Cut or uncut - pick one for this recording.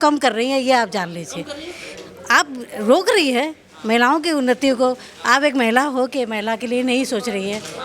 uncut